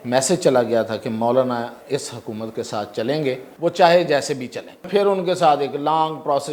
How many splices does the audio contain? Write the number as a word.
two